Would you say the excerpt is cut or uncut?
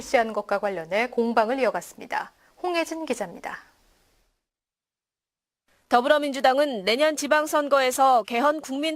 uncut